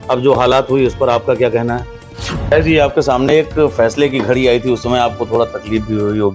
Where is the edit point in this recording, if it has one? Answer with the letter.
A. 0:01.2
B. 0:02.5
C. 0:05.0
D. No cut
B